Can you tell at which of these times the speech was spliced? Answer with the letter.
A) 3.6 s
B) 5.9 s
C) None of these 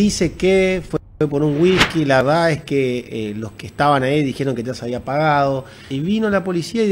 B